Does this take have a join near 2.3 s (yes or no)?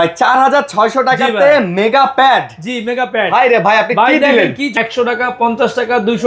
no